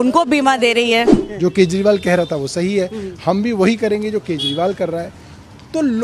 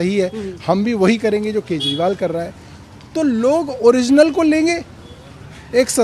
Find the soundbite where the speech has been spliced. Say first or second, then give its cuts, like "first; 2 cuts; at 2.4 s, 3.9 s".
first; 1 cut; at 1.2 s